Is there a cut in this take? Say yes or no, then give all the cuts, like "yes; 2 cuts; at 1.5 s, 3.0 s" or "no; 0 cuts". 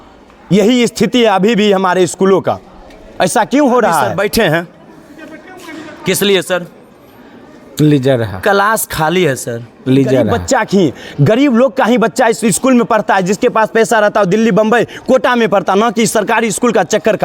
yes; 2 cuts; at 4.1 s, 10.4 s